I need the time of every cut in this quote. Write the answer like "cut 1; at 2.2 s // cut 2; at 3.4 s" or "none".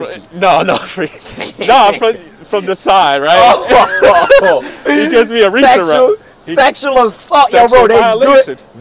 none